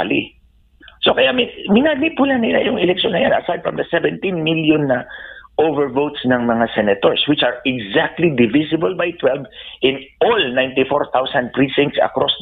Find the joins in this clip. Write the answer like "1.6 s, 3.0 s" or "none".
none